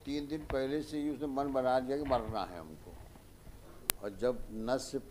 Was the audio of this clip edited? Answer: yes; 1 cut; at 4.0 s

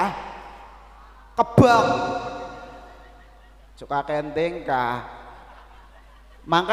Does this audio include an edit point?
no; 0 cuts

